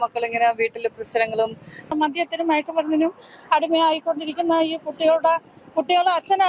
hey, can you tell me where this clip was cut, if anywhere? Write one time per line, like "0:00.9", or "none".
0:01.9